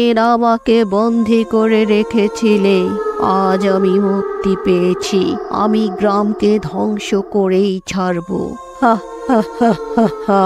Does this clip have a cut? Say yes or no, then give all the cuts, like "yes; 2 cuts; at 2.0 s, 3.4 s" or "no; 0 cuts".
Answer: no; 0 cuts